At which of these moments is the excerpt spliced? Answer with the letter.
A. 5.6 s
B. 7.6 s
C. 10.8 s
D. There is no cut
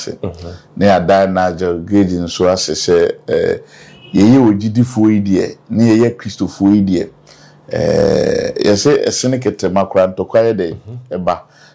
D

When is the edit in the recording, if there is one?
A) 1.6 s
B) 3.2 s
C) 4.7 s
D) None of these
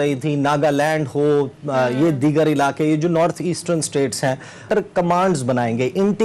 C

